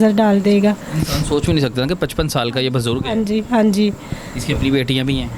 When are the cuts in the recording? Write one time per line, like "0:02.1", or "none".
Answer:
none